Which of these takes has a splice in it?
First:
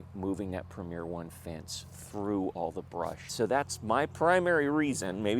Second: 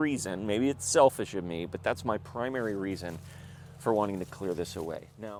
first; 1 cut; at 3.2 s

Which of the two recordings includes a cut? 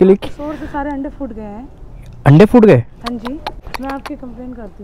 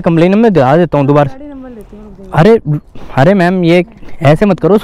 first; 1 cut; at 3.6 s

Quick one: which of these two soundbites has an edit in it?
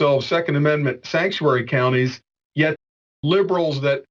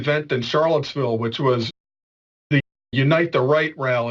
first; 1 cut; at 2.8 s

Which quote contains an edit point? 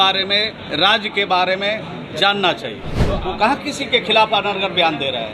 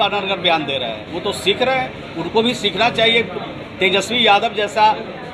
first; 1 cut; at 3.2 s

